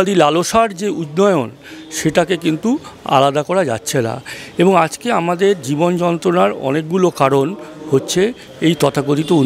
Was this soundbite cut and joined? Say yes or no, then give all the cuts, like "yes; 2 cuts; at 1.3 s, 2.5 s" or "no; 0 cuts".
no; 0 cuts